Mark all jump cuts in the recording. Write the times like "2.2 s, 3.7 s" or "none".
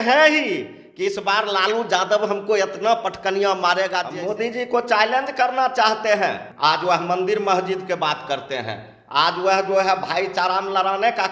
4.1 s, 6.5 s